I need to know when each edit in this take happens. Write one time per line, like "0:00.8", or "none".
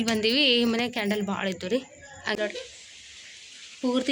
0:02.3